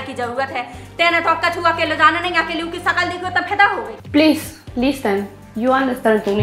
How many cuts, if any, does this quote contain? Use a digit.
1